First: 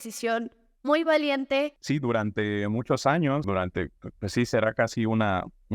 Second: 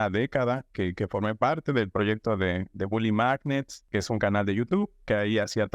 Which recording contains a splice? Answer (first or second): first